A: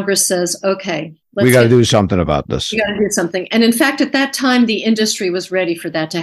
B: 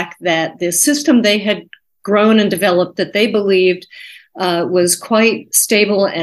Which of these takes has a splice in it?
A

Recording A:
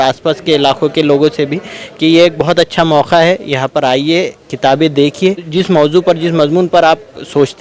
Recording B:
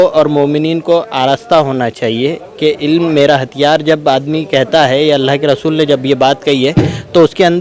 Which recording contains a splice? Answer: A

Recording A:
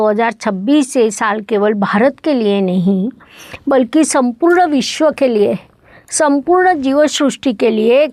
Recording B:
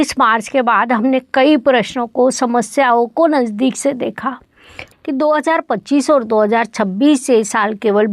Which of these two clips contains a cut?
B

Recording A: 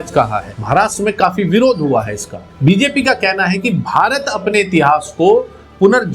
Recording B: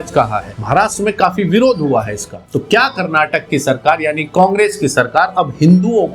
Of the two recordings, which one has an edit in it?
B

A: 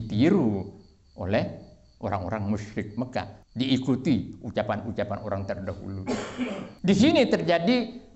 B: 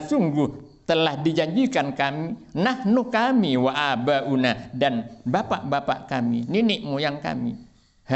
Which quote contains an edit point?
A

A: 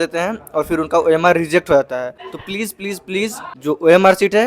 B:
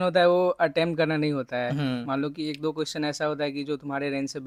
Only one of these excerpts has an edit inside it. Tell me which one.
A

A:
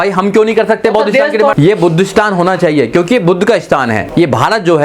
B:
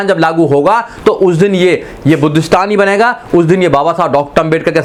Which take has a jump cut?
A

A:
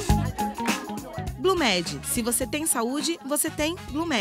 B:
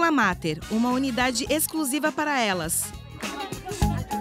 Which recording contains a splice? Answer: A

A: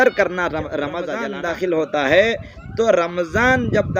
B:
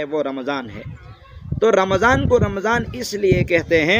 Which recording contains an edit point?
A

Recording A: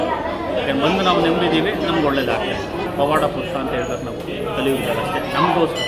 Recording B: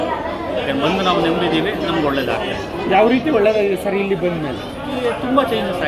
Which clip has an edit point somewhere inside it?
A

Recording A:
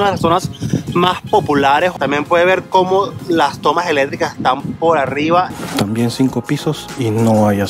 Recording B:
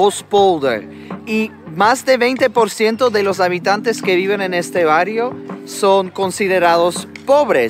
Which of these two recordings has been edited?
A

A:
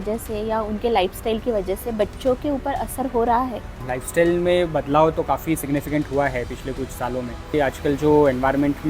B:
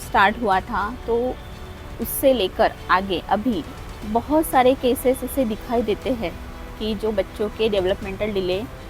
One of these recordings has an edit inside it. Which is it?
A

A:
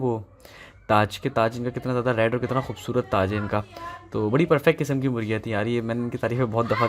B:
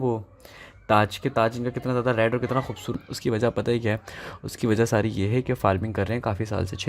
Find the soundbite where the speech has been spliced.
B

